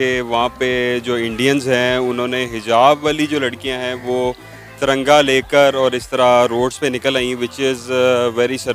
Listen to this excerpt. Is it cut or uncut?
uncut